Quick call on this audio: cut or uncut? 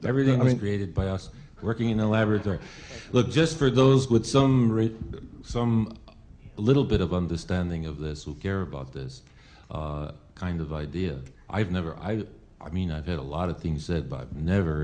cut